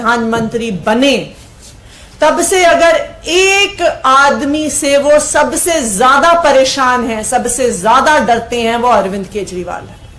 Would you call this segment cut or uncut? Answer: uncut